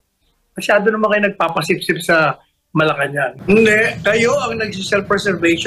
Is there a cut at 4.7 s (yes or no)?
no